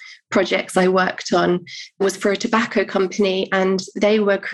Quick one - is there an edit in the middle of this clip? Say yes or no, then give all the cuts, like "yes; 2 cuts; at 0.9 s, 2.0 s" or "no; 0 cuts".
yes; 1 cut; at 2.0 s